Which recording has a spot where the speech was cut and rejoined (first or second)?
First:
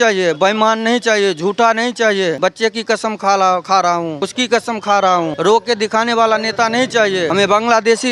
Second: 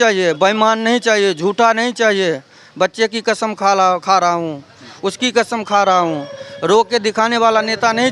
first